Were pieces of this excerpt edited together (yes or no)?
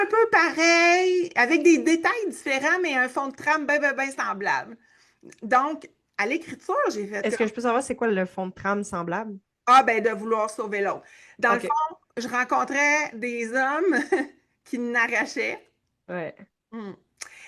no